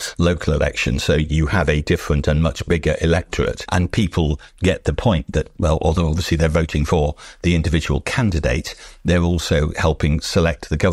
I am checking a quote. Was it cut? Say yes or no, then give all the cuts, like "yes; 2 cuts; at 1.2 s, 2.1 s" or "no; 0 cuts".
no; 0 cuts